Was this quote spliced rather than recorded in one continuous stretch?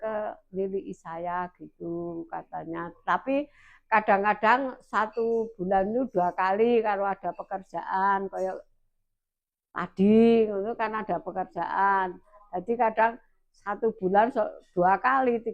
no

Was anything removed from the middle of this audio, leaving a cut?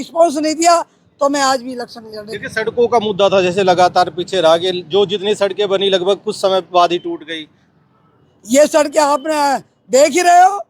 no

